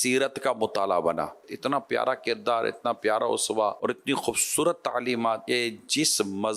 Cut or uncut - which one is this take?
cut